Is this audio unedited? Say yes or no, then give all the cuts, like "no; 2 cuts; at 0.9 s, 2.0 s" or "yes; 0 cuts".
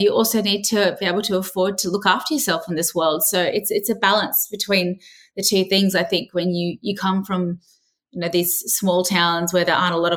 yes; 0 cuts